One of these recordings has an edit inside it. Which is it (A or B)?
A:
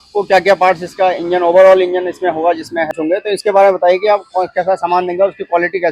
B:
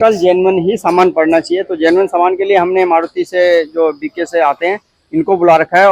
A